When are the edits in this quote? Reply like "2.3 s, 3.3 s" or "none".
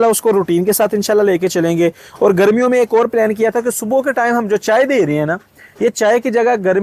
none